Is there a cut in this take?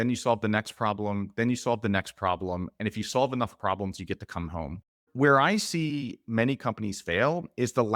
yes; 1 cut; at 5.0 s

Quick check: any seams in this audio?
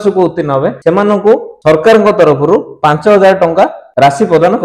no; 0 cuts

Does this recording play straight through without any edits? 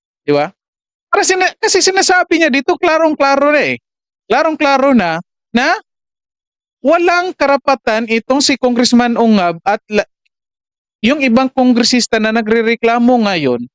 yes; 0 cuts

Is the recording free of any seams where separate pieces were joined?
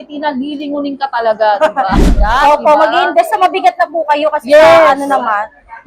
no; 1 cut; at 2.1 s

